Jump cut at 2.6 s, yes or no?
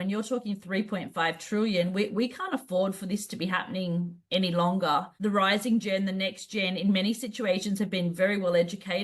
no